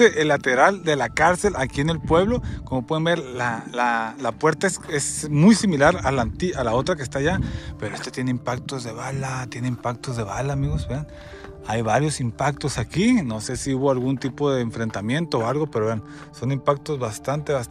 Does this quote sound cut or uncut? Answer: uncut